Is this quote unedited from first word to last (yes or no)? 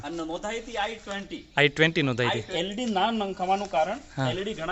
no